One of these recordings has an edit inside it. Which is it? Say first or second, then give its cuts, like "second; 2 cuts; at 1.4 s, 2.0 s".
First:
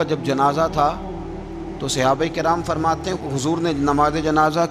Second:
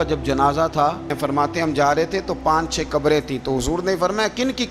second; 1 cut; at 1.1 s